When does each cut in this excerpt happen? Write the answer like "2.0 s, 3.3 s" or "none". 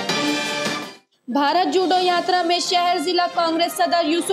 1.0 s